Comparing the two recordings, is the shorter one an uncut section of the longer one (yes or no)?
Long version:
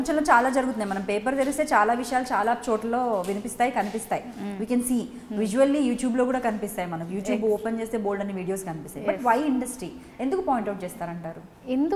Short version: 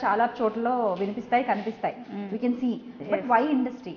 no